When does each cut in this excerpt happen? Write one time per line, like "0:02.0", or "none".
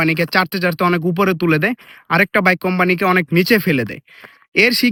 none

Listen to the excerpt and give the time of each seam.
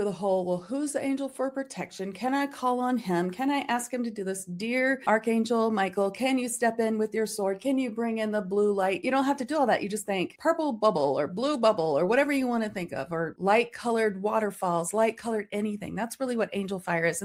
none

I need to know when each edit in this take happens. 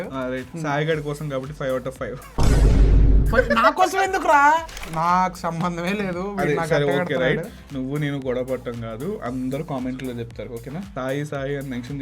0:04.9

